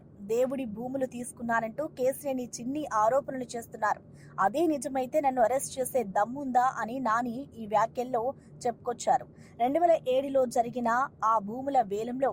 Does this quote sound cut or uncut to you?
uncut